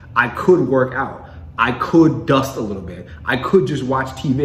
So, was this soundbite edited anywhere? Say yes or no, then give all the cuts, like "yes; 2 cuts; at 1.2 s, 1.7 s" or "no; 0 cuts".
no; 0 cuts